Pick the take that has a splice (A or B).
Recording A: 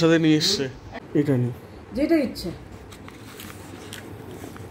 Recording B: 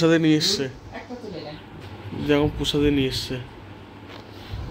A